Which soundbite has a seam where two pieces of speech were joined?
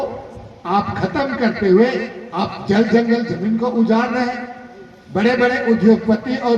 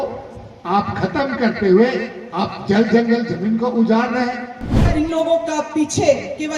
second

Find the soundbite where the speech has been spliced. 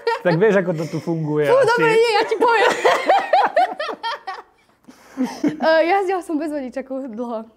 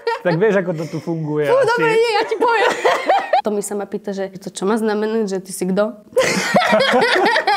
second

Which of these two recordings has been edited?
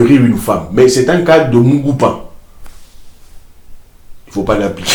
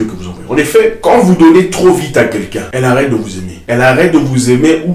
second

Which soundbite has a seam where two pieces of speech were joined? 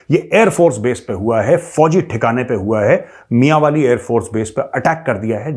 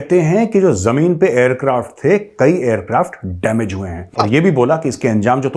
second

